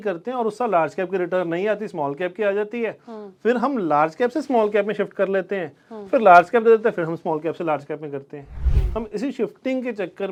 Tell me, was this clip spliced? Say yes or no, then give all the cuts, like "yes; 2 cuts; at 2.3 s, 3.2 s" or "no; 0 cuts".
no; 0 cuts